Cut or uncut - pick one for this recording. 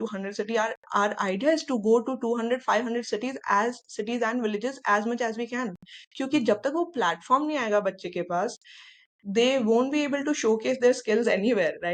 uncut